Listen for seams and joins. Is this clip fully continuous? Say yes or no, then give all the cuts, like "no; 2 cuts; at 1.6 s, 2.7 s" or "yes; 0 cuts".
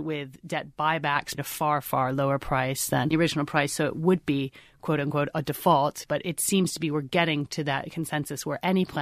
no; 2 cuts; at 1.4 s, 6.0 s